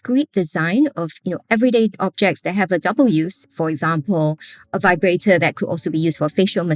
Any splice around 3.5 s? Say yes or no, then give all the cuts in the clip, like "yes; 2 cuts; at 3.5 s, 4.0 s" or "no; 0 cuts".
yes; 1 cut; at 3.5 s